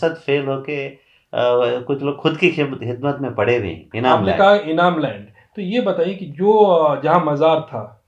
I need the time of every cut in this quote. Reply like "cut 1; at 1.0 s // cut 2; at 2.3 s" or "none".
none